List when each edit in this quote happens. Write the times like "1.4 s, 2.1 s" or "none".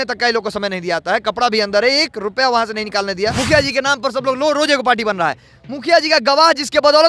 3.3 s

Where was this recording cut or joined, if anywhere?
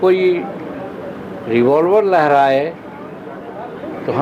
none

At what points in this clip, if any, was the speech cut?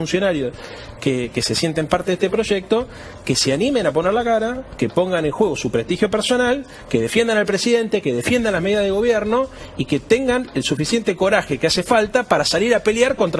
none

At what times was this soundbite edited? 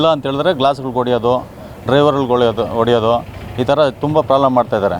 none

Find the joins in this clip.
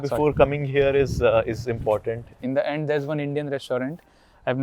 2.4 s

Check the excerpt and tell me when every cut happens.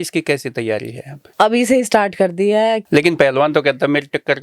1.2 s, 2.8 s

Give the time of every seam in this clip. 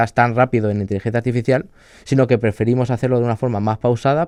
none

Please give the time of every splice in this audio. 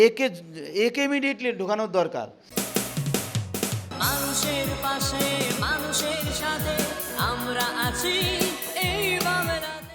2.4 s

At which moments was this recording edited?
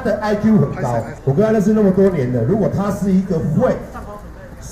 1.1 s

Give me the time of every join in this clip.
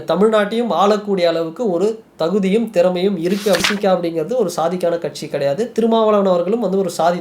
3.6 s

